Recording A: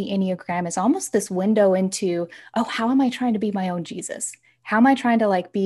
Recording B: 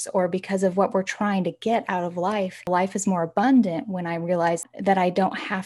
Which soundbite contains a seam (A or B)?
B